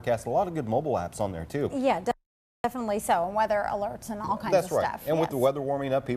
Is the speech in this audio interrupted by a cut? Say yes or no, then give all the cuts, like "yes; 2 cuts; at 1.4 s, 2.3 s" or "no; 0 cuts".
no; 0 cuts